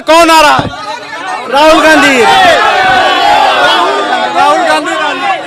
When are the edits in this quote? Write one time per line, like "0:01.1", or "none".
none